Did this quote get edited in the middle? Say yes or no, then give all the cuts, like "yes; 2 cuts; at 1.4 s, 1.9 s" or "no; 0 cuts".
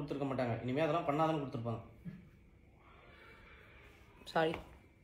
yes; 2 cuts; at 1.8 s, 3.8 s